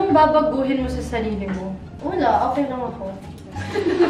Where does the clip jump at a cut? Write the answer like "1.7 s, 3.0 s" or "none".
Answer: 1.9 s

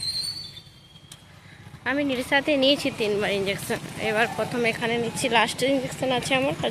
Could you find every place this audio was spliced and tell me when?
none

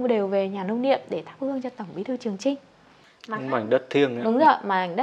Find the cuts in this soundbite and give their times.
3.4 s

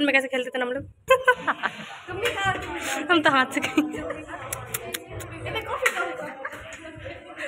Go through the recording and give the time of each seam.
1.0 s

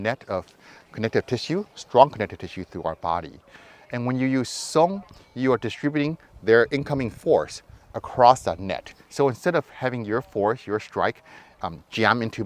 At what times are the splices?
none

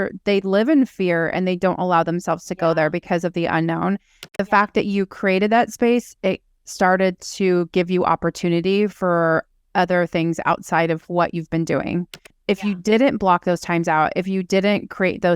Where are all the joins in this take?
4.4 s, 12.4 s

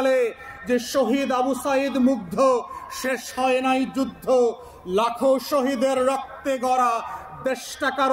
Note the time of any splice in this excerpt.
none

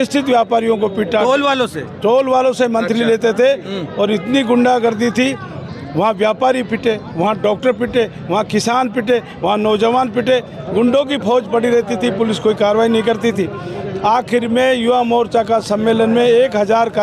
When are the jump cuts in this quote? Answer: none

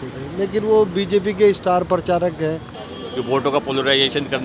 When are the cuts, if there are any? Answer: 2.7 s

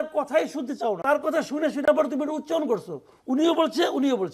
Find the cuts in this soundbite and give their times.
1.0 s

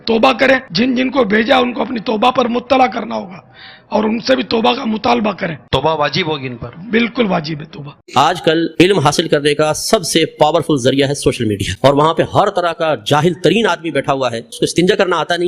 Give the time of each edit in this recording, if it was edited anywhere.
8.0 s

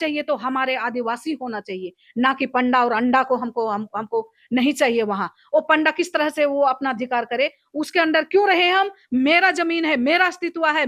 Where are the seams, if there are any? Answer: none

